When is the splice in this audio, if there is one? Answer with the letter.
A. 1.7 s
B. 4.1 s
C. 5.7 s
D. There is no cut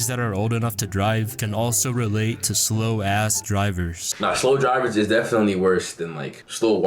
B